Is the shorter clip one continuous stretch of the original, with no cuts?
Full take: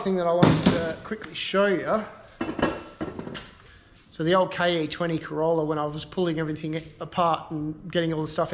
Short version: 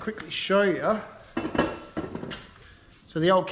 yes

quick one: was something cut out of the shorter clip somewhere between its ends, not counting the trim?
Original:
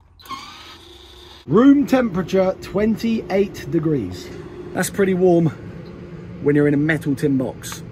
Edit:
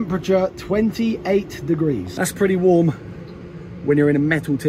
yes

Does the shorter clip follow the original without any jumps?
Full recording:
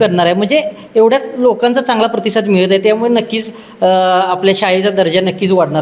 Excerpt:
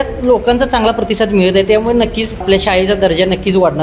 no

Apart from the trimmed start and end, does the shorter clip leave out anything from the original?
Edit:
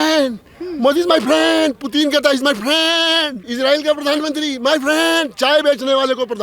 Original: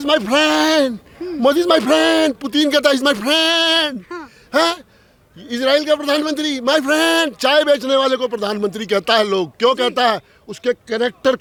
yes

